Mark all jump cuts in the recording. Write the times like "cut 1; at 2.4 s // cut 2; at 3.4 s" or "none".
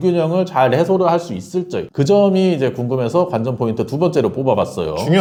none

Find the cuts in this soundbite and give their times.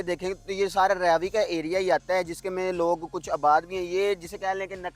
none

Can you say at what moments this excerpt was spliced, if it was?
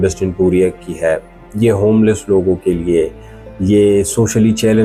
none

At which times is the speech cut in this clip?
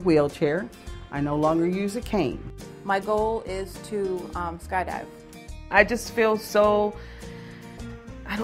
cut 1; at 2.6 s // cut 2; at 5.5 s

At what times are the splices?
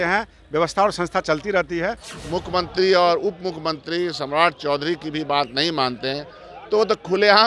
cut 1; at 2.1 s

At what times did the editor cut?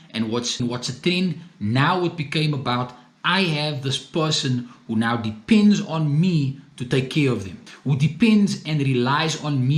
none

